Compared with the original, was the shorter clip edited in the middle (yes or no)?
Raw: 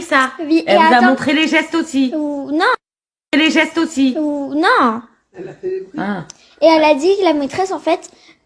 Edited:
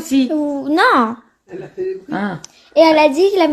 yes